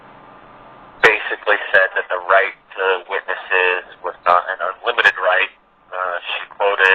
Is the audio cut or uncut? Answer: cut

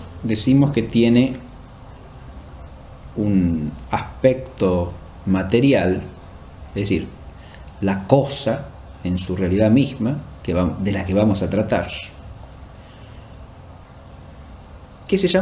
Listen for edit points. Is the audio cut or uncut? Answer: uncut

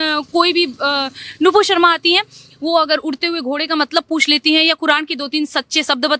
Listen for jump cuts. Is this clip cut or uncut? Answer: uncut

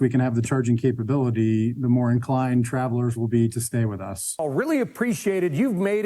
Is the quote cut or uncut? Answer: cut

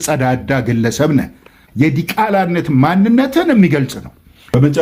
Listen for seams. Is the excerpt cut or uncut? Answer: uncut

